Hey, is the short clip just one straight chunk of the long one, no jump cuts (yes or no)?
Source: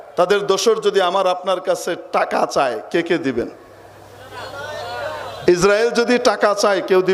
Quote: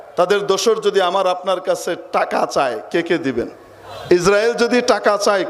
no